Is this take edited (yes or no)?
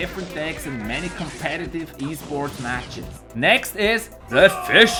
no